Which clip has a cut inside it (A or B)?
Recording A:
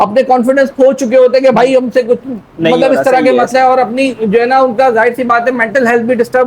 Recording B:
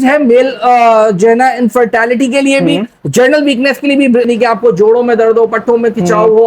B